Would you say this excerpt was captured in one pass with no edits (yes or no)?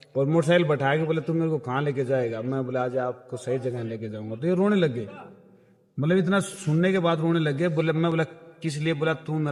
yes